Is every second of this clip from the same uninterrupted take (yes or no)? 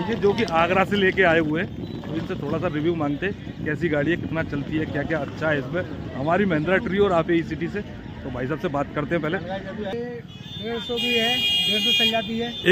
no